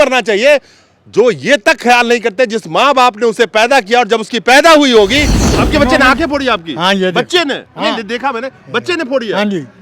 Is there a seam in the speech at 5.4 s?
yes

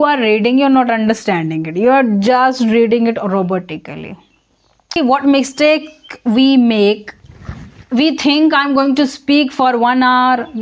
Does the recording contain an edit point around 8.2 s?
no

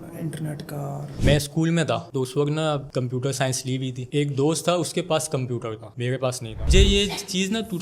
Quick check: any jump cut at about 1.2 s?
yes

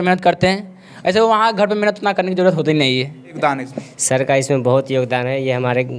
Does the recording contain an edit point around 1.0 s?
no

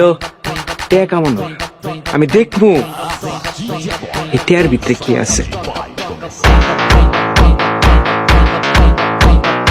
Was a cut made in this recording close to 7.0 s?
no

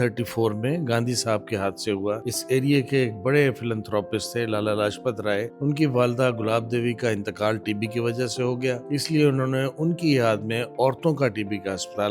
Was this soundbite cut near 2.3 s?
yes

